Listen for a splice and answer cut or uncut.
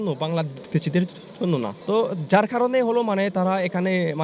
cut